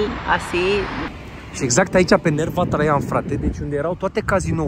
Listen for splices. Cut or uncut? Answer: cut